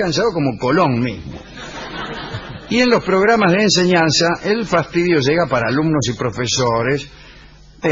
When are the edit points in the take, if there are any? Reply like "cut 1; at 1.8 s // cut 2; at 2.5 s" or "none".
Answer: none